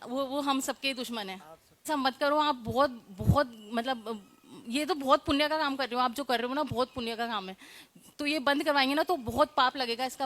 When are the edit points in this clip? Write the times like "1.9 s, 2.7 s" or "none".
1.9 s